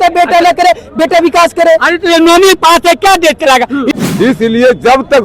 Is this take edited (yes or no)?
yes